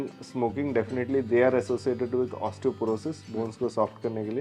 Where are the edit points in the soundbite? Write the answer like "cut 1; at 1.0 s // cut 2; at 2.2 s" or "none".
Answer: none